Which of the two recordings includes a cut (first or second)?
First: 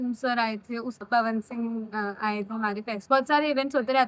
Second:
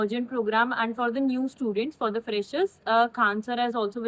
first